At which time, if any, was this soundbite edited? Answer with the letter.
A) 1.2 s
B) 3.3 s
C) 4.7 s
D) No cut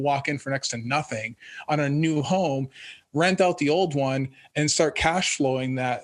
D